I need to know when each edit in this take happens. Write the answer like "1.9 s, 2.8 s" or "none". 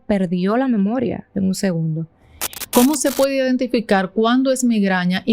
2.6 s